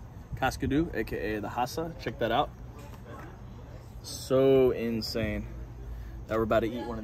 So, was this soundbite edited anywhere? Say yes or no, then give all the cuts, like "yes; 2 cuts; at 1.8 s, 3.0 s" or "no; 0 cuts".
no; 0 cuts